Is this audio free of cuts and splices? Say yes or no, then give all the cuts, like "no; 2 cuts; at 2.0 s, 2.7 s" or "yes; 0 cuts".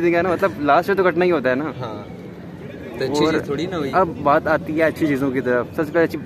yes; 0 cuts